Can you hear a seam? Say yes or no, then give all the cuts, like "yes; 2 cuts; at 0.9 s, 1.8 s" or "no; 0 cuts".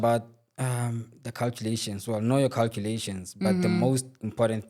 no; 0 cuts